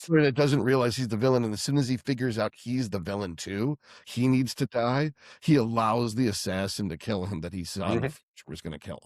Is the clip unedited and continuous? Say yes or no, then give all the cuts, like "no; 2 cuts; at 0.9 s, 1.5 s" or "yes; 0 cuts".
yes; 0 cuts